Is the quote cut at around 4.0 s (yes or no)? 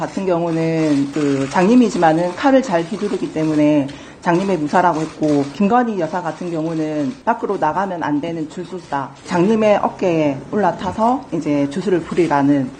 no